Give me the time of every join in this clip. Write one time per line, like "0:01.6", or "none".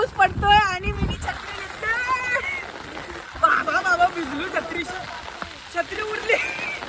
none